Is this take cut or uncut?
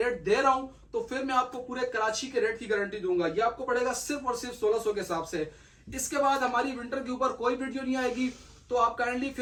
uncut